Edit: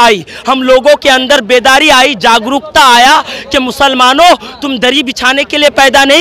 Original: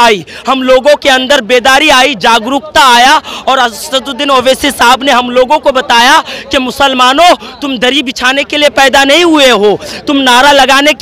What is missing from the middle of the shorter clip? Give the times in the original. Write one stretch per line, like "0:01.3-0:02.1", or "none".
0:03.3-0:06.3